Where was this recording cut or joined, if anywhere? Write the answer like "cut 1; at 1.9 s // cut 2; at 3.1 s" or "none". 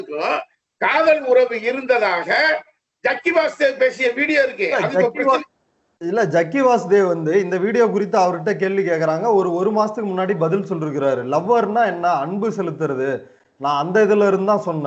none